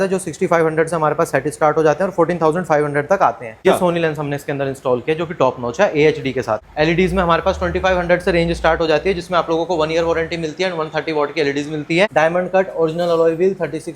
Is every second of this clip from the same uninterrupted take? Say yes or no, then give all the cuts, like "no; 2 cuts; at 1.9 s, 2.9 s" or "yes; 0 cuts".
no; 3 cuts; at 3.6 s, 6.7 s, 12.1 s